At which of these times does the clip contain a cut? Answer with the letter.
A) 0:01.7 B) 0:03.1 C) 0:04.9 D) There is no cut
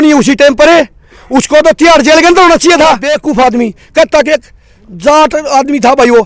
B